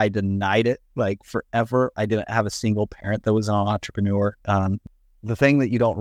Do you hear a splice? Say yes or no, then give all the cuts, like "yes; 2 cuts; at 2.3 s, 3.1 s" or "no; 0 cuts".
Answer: yes; 1 cut; at 4.8 s